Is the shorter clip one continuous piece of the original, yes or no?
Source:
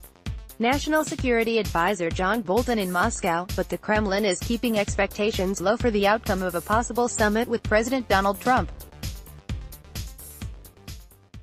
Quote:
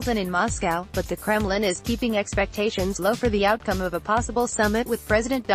yes